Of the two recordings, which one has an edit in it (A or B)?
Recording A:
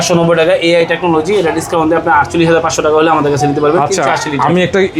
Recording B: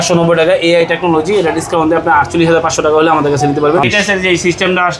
B